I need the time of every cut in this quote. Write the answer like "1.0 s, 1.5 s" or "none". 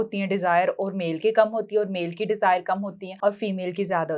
3.0 s